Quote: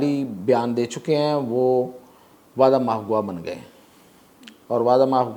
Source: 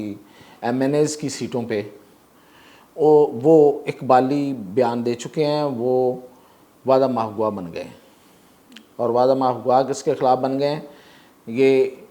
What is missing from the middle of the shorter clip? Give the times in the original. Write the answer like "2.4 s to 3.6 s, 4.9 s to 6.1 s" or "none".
none